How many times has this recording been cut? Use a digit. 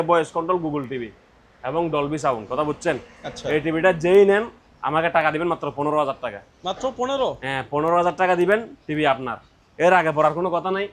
0